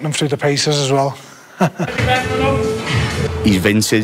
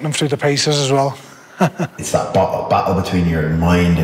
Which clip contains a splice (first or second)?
second